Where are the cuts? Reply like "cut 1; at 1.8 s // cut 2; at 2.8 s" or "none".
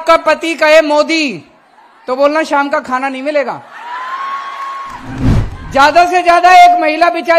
cut 1; at 5.3 s